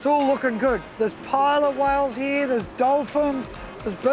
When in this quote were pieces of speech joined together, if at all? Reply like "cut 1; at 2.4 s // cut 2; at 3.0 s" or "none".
cut 1; at 0.9 s